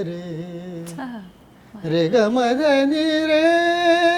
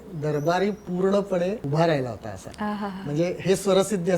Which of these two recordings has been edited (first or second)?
second